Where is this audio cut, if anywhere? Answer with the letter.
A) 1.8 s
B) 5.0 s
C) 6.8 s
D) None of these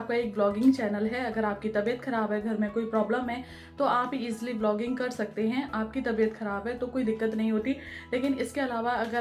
D